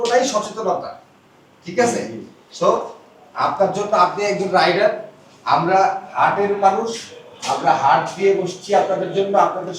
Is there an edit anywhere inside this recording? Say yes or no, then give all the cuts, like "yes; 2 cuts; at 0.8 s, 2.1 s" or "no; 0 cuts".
no; 0 cuts